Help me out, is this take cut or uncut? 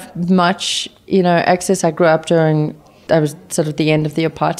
cut